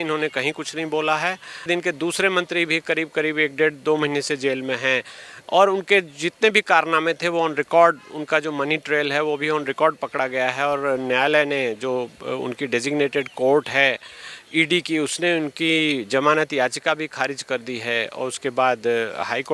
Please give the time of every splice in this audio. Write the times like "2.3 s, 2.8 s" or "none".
1.7 s